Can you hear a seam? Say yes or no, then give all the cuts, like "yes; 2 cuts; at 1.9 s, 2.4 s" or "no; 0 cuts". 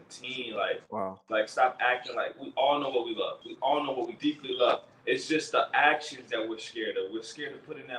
yes; 1 cut; at 1.2 s